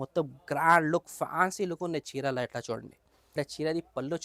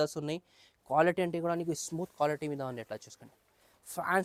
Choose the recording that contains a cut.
first; 1 cut; at 3.3 s

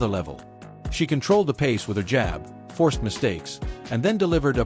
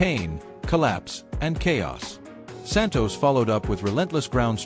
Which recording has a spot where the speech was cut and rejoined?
second; 1 cut; at 2.1 s

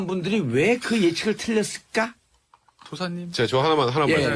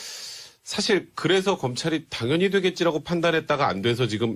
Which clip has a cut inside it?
second; 1 cut; at 2.7 s

